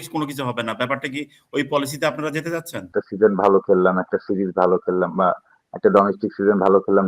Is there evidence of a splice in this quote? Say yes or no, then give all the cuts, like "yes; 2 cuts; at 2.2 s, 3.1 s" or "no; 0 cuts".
yes; 1 cut; at 2.9 s